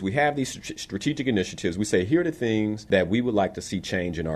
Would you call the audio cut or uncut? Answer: cut